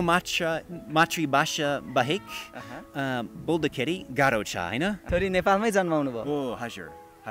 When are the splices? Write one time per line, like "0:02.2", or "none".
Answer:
0:05.0